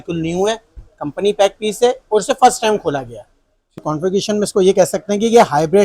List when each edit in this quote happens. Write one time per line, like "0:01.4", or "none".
0:03.8